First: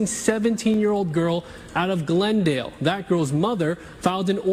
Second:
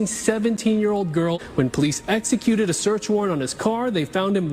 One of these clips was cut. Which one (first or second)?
second